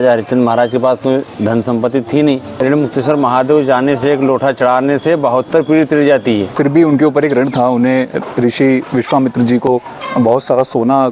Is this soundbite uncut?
no; 2 cuts; at 2.5 s, 6.5 s

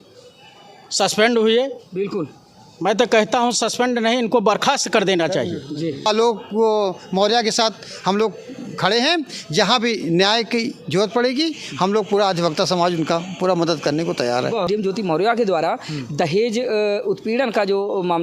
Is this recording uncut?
no; 2 cuts; at 6.1 s, 14.7 s

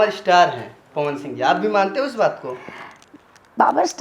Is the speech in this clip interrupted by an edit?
no; 0 cuts

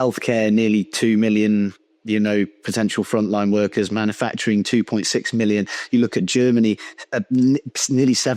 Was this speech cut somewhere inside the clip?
no; 0 cuts

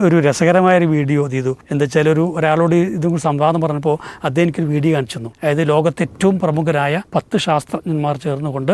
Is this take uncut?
no; 3 cuts; at 1.6 s, 5.2 s, 7.0 s

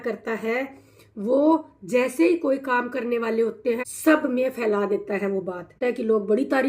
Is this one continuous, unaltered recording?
no; 2 cuts; at 3.9 s, 5.8 s

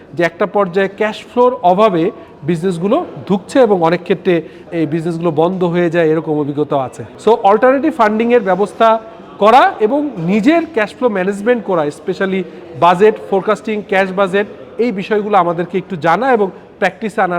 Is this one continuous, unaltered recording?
yes; 0 cuts

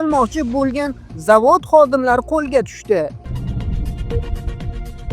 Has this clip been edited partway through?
yes; 1 cut; at 3.2 s

